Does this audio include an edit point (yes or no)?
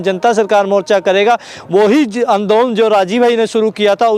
no